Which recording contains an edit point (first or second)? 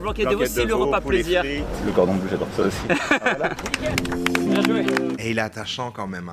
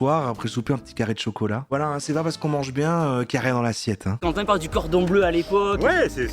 second